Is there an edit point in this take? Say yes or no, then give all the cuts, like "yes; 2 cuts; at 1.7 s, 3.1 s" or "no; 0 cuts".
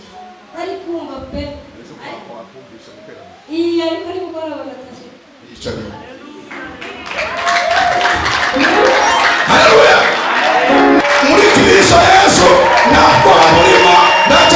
yes; 1 cut; at 11.0 s